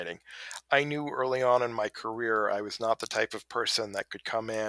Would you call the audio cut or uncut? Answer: uncut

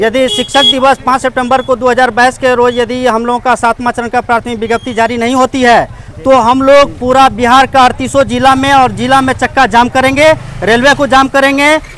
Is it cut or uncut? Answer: uncut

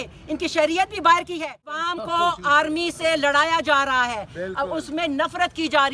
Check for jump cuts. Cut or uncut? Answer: cut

